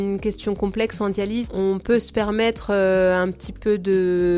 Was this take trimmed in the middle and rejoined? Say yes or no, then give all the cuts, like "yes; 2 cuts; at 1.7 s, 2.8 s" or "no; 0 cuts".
yes; 1 cut; at 1.5 s